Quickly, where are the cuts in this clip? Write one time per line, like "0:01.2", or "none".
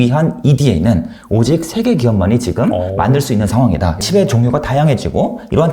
0:04.0